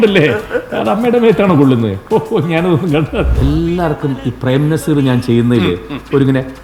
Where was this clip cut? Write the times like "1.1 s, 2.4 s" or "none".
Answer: 3.3 s